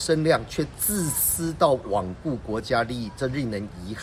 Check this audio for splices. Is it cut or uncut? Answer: uncut